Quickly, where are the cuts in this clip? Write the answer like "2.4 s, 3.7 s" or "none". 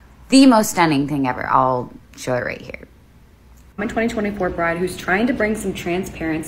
3.6 s